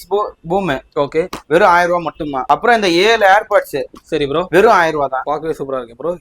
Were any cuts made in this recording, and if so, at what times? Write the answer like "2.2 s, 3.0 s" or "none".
2.4 s, 5.2 s